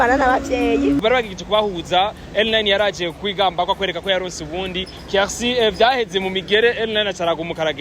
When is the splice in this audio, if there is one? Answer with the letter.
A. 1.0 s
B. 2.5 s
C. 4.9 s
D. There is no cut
A